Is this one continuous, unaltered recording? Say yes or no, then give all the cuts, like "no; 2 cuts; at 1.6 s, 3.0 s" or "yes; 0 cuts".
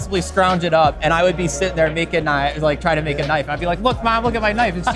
yes; 0 cuts